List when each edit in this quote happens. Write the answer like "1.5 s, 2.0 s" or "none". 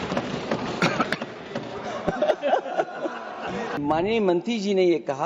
3.8 s